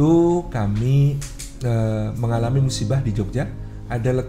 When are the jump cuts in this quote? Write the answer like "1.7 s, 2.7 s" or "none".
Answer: none